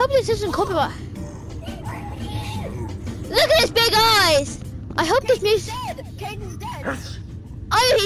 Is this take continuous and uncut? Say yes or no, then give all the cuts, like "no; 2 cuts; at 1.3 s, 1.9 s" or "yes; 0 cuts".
yes; 0 cuts